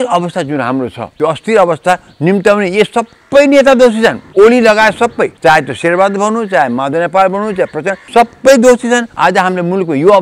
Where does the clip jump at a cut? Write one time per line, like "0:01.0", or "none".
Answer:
0:01.0
0:04.2
0:05.3
0:08.0
0:09.1

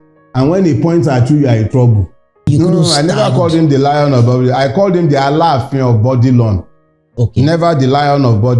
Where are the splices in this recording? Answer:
0:02.5

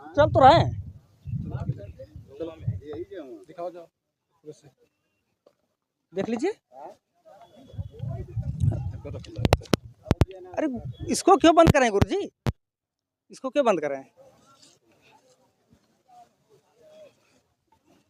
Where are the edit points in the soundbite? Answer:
none

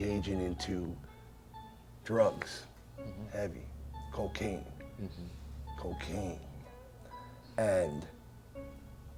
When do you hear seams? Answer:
none

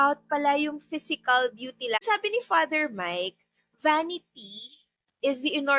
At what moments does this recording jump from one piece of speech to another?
0:02.0

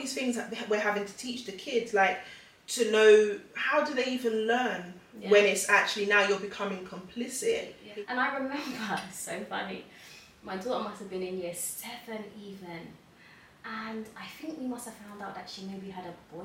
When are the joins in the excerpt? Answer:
0:07.8

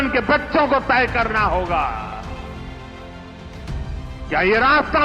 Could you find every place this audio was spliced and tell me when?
0:02.1
0:04.3

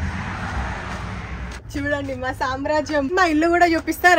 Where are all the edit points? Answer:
0:01.6
0:03.1

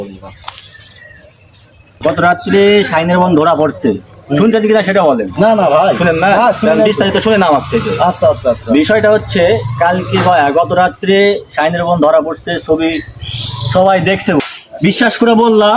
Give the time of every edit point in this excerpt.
0:01.9
0:14.4

